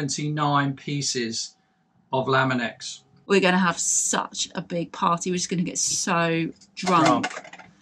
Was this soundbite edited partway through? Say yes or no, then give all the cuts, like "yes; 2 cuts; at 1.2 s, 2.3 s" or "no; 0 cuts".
yes; 1 cut; at 3.1 s